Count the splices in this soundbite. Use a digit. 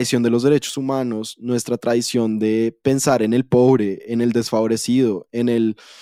0